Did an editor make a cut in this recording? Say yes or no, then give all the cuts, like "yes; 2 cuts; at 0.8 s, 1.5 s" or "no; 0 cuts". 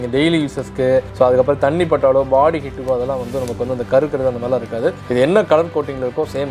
no; 0 cuts